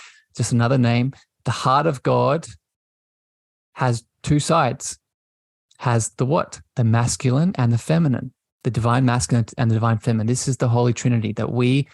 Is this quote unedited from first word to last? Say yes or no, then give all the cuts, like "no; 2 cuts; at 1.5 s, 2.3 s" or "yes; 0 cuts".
yes; 0 cuts